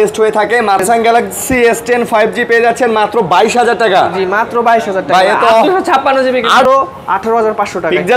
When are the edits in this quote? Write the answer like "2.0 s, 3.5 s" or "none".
0.8 s, 6.7 s